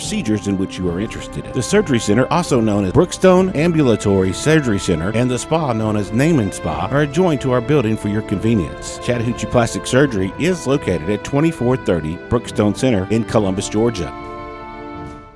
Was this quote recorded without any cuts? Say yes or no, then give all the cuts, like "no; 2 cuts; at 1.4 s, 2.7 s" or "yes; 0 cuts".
no; 1 cut; at 14.0 s